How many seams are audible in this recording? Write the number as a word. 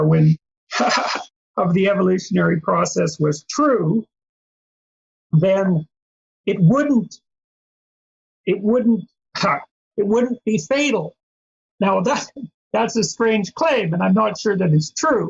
zero